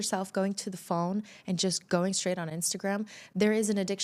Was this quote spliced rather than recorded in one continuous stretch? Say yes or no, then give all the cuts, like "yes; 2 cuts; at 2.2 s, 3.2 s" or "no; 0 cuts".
no; 0 cuts